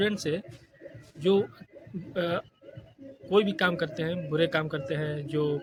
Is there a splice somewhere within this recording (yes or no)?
no